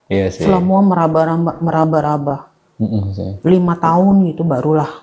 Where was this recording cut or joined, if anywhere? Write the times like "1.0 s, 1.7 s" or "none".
none